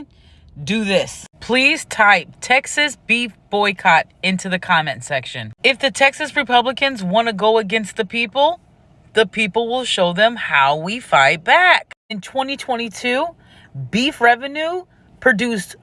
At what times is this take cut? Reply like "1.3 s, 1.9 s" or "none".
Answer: none